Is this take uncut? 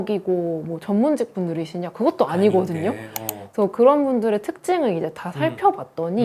yes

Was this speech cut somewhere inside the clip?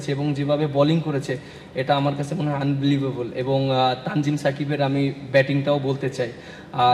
no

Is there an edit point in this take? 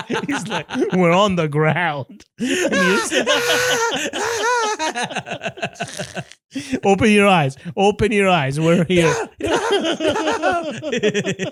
no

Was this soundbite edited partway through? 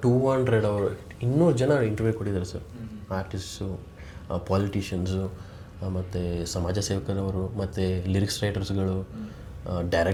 no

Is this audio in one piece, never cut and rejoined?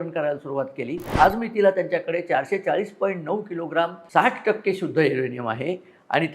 no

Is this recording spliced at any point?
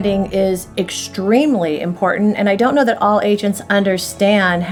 no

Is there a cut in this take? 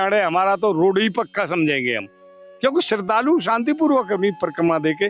no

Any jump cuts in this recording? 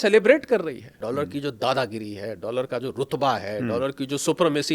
yes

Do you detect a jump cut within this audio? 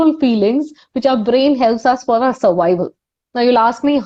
no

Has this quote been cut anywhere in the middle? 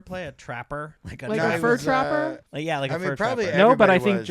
yes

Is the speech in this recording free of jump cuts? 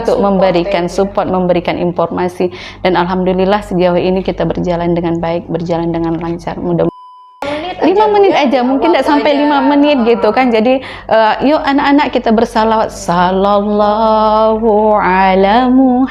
no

